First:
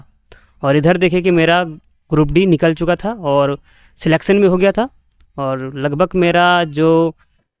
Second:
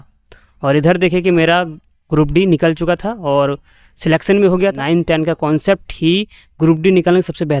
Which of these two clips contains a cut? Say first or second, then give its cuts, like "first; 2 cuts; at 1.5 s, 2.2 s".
second; 1 cut; at 4.8 s